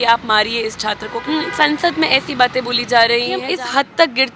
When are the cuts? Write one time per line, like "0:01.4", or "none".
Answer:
0:01.2
0:03.4